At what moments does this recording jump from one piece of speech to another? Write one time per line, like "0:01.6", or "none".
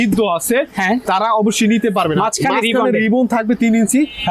0:01.0
0:02.1